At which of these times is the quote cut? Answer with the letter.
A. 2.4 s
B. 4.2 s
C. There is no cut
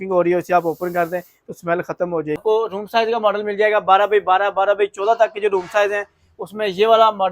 A